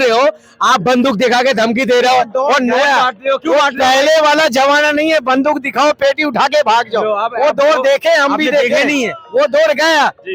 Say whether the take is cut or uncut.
uncut